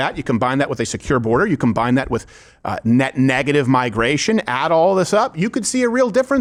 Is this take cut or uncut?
uncut